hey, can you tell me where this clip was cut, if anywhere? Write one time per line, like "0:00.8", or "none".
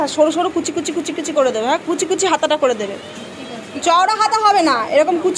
none